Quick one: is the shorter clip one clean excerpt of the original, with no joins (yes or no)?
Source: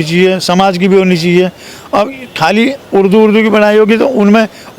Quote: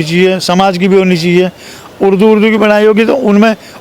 no